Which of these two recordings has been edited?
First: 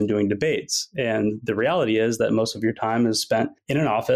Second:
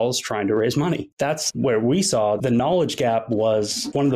second; 1 cut; at 1.1 s

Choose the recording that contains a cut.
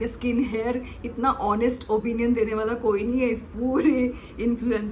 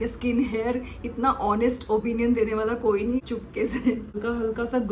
second; 2 cuts; at 3.2 s, 4.2 s

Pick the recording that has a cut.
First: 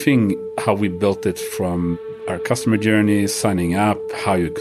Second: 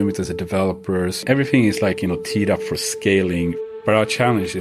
second; 2 cuts; at 1.2 s, 3.6 s

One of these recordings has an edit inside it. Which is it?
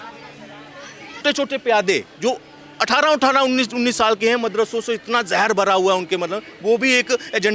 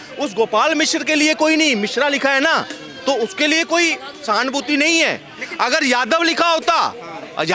first; 1 cut; at 1.2 s

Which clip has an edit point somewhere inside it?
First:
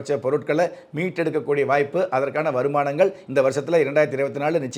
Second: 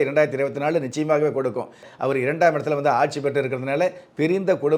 second; 1 cut; at 1.9 s

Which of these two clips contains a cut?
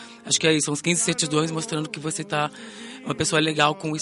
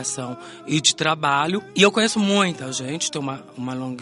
second; 1 cut; at 1.7 s

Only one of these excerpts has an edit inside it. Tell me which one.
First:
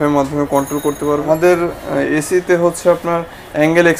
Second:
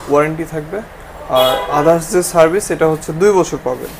first; 1 cut; at 1.2 s

